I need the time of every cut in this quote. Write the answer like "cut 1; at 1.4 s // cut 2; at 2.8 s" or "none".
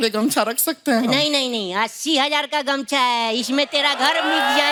none